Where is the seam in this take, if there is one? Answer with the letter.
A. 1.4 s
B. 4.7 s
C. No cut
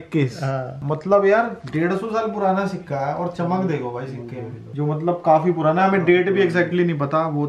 B